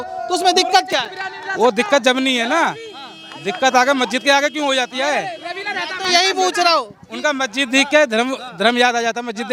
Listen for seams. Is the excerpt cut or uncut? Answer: uncut